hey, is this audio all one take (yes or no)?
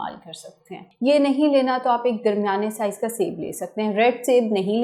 yes